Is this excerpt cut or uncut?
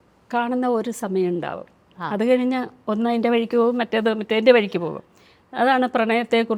uncut